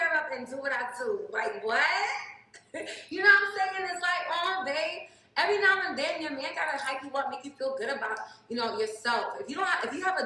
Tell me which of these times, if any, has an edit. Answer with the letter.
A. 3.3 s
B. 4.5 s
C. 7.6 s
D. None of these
A